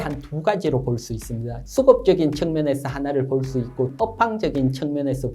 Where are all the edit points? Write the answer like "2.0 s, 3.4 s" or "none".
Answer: 1.5 s, 3.9 s